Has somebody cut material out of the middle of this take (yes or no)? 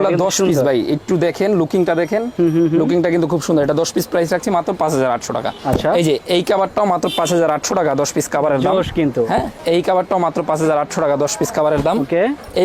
no